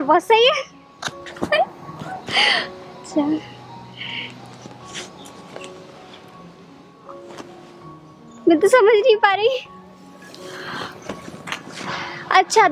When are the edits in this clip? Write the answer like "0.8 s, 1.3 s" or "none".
none